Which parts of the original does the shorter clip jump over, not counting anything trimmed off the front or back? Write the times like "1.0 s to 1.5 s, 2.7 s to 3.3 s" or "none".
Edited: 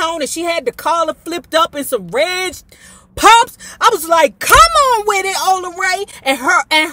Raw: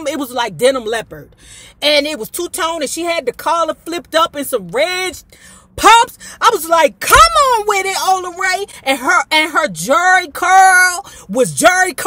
none